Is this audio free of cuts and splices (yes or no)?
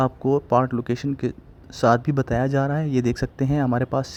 yes